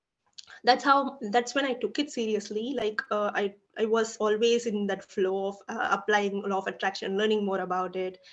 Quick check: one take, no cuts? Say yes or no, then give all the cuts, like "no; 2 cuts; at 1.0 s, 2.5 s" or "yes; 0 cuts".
yes; 0 cuts